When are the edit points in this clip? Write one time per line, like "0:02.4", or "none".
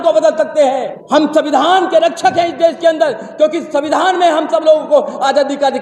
0:00.9